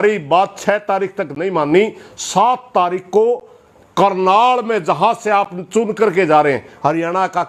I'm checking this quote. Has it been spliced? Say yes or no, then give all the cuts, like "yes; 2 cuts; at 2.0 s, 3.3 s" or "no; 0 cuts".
no; 0 cuts